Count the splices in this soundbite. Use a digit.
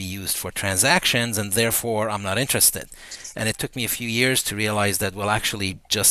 0